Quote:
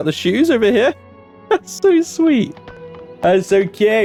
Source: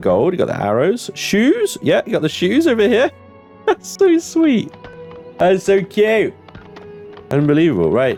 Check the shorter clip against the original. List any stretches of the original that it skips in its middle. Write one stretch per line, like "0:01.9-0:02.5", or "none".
none